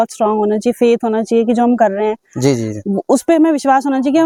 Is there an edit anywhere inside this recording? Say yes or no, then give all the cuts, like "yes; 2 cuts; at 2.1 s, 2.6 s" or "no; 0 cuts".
no; 0 cuts